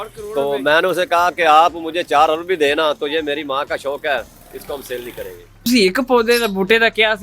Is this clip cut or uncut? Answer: cut